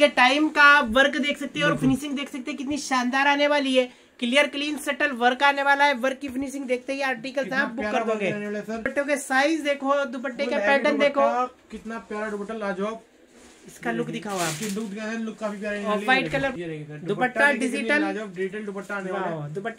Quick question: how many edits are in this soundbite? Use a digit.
2